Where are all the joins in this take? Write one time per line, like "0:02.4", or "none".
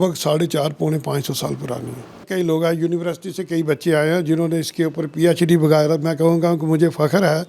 0:02.3